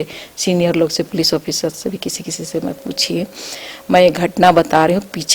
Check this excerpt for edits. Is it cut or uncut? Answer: uncut